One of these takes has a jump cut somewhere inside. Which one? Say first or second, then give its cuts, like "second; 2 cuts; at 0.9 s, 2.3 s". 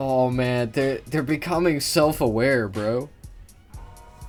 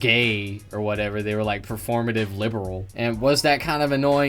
second; 1 cut; at 2.8 s